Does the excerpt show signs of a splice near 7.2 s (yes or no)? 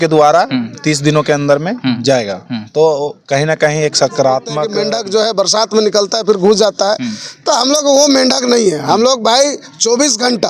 no